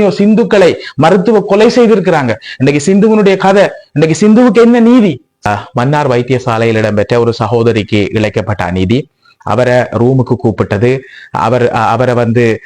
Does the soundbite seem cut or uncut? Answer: cut